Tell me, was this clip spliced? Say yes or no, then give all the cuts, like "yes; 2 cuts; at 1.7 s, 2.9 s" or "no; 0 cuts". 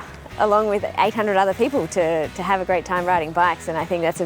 no; 0 cuts